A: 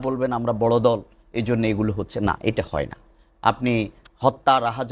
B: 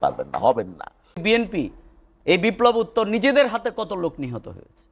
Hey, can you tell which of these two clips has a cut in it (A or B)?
B